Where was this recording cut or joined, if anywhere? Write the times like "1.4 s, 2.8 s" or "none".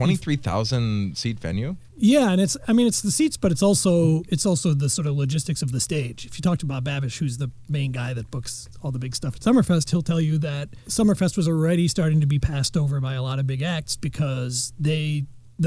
none